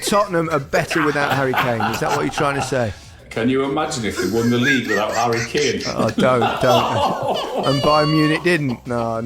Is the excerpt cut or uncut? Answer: cut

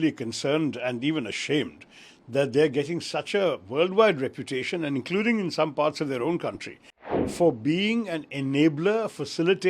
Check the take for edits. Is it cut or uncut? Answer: cut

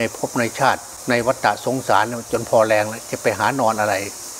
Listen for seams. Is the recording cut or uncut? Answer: cut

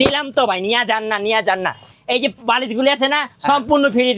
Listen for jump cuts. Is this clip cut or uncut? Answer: cut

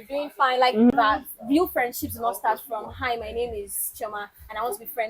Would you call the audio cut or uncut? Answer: cut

